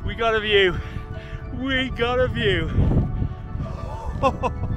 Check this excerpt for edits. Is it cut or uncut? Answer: uncut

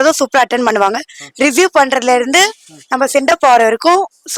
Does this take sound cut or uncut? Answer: uncut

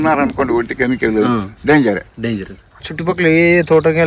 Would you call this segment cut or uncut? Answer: cut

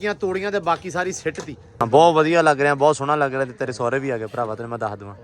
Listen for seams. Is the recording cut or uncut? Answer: cut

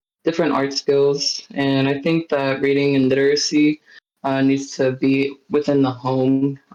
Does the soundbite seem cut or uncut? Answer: uncut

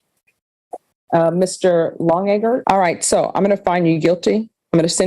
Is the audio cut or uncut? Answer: cut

